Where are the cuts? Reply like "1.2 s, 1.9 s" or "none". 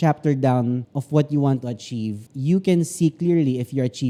none

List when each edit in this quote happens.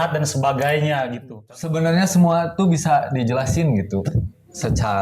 1.3 s

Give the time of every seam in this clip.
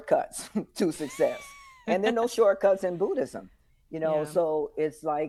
none

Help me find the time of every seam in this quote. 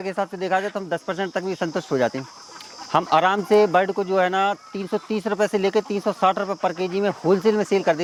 none

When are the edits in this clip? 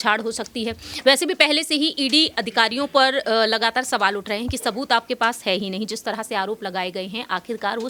none

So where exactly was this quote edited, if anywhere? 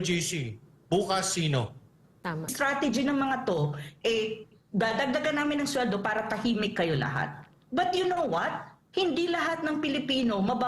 2.5 s

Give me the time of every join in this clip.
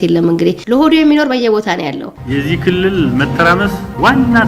2.1 s

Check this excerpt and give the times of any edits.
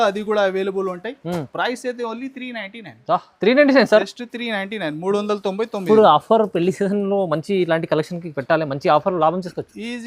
none

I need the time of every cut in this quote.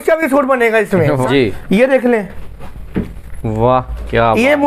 1.2 s

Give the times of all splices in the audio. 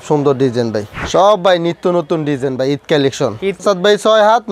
0.9 s, 3.6 s

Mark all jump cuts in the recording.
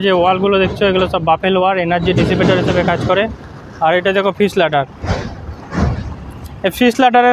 none

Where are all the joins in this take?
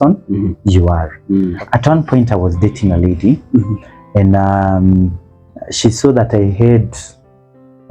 1.5 s

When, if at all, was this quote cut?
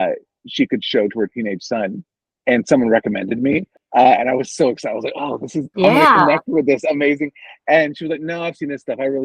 3.7 s

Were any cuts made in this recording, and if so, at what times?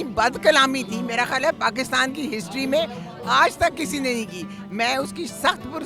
none

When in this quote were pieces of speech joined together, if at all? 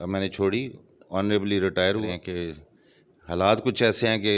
2.1 s

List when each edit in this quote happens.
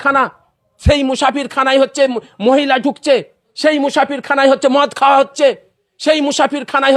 none

